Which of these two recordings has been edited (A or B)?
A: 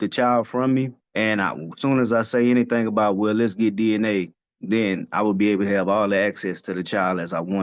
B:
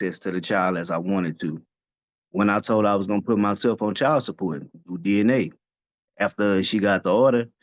A